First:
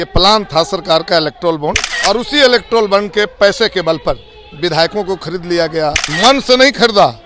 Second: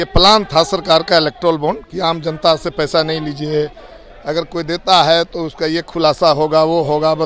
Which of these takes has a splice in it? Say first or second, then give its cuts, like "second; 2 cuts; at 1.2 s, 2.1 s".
first; 2 cuts; at 1.9 s, 6.0 s